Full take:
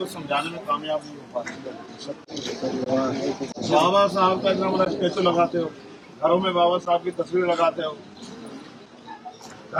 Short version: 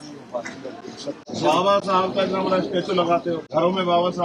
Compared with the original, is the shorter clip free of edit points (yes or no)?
no